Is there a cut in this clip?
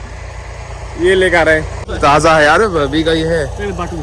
yes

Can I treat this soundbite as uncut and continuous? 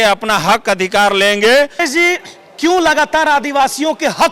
no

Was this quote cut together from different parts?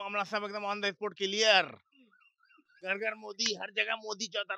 no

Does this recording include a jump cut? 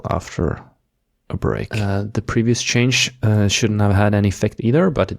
yes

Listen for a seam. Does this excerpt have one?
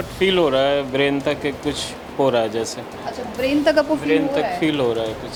no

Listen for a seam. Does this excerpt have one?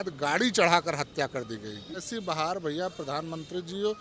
yes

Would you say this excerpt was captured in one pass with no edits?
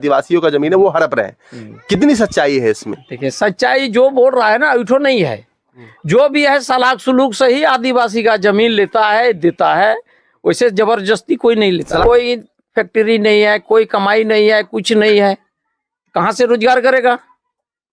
no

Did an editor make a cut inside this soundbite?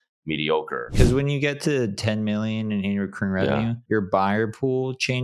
yes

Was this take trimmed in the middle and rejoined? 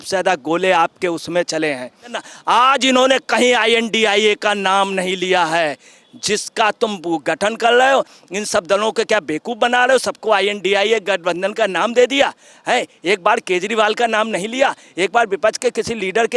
yes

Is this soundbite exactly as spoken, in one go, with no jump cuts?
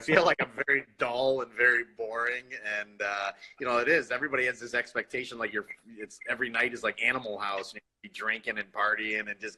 yes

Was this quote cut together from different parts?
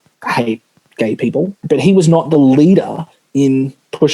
yes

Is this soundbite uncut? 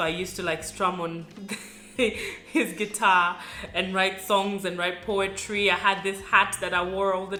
yes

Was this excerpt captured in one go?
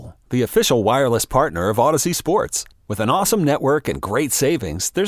yes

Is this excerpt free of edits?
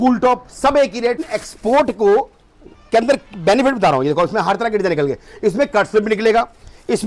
no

